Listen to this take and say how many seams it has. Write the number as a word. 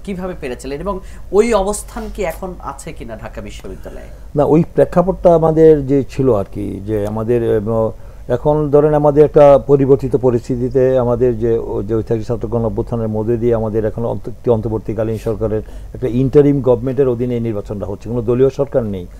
zero